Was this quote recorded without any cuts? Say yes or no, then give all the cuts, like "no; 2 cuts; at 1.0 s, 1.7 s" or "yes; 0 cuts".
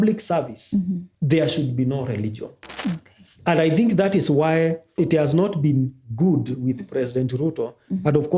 no; 1 cut; at 1.1 s